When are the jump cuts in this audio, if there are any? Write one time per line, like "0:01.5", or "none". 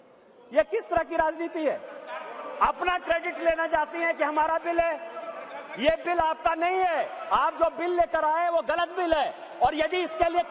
none

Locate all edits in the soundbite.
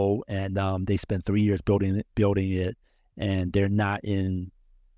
none

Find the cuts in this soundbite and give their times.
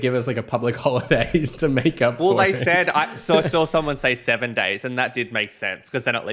none

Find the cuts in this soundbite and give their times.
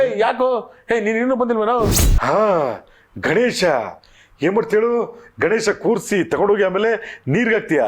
0:02.1

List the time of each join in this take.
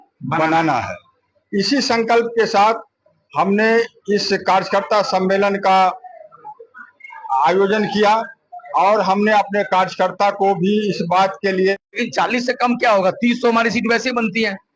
0:12.0

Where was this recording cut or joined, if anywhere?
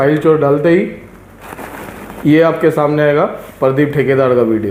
none

